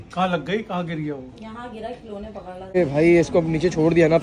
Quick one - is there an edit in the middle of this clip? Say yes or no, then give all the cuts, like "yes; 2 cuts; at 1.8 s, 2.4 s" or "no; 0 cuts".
yes; 1 cut; at 2.8 s